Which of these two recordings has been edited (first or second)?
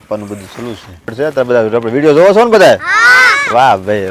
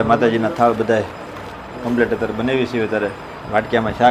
first